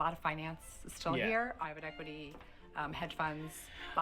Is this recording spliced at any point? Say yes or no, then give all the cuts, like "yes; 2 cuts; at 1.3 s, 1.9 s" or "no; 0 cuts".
yes; 1 cut; at 1.6 s